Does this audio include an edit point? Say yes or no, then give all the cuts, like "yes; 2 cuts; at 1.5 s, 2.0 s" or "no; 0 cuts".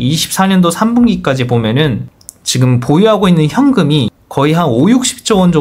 no; 0 cuts